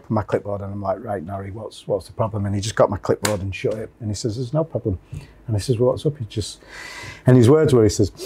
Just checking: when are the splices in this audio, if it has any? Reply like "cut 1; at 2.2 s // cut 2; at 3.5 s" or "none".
none